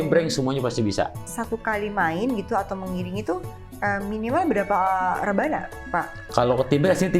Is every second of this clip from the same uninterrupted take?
no; 1 cut; at 1.3 s

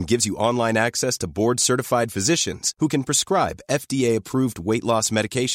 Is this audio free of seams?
yes; 0 cuts

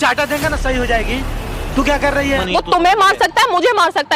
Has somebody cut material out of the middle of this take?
yes; 1 cut; at 2.4 s

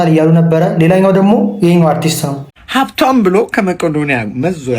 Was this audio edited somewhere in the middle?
yes; 1 cut; at 2.8 s

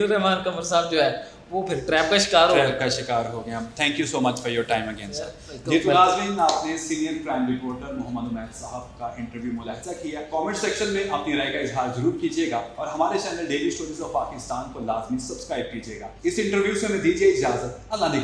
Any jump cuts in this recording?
no; 0 cuts

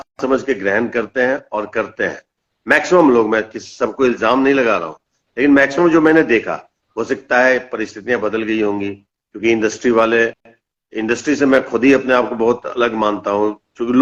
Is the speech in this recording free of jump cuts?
yes; 0 cuts

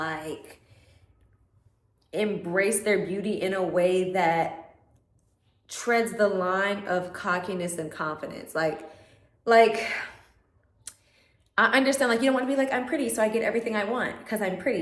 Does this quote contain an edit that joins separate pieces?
no; 0 cuts

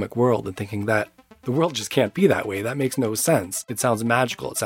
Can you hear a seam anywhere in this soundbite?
yes; 1 cut; at 3.6 s

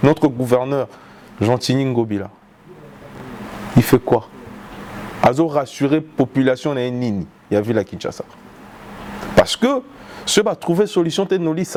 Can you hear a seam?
no; 0 cuts

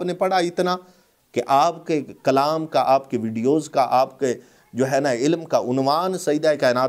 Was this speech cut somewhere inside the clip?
no; 0 cuts

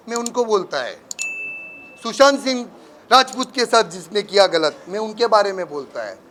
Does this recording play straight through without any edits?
yes; 0 cuts

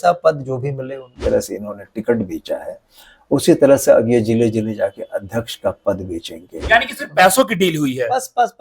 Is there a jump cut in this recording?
yes; 2 cuts; at 1.2 s, 6.6 s

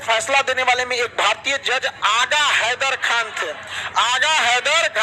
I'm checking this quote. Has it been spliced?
no; 0 cuts

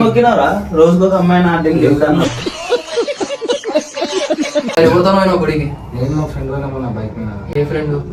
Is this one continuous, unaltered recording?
yes; 0 cuts

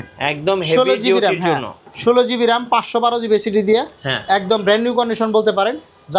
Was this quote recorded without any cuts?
yes; 0 cuts

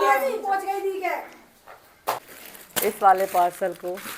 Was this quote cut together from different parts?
yes; 1 cut; at 2.3 s

